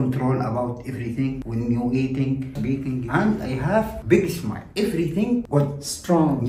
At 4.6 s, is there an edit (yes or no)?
no